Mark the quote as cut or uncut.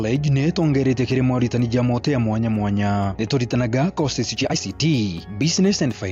cut